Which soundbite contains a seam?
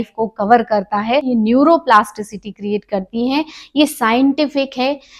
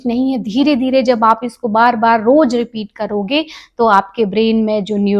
first; 1 cut; at 1.3 s

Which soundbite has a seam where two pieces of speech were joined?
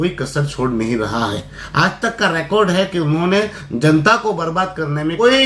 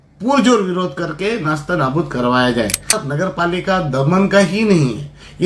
second; 1 cut; at 3.0 s

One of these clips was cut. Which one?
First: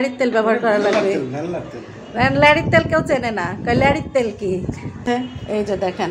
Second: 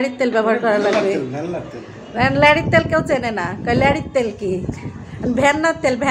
first; 1 cut; at 5.0 s

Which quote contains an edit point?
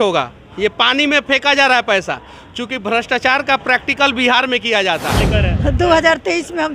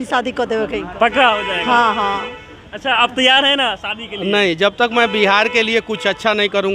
first; 1 cut; at 5.2 s

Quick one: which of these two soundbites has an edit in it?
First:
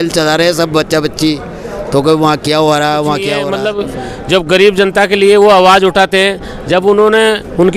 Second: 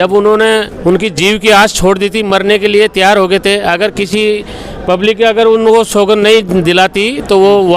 first; 1 cut; at 3.4 s

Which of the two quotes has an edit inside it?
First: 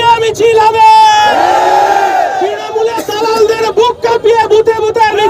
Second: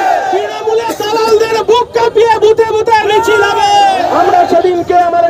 second; 1 cut; at 4.1 s

